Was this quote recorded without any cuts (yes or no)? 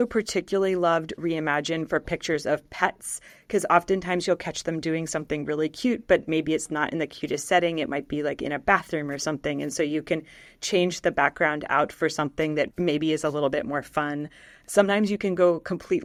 yes